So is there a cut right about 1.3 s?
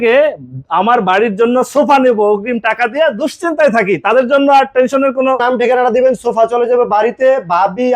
no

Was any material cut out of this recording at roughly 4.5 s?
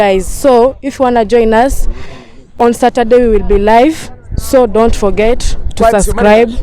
no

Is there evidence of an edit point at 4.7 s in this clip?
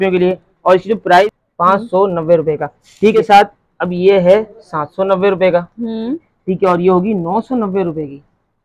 no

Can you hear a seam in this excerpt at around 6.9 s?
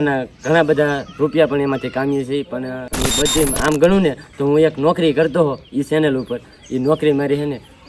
no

